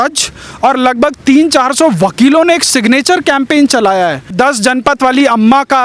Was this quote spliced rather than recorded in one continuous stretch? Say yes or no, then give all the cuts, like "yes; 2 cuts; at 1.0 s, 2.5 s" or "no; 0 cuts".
yes; 1 cut; at 4.3 s